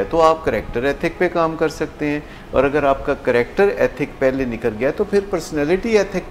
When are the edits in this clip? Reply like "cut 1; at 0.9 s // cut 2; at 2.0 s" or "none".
none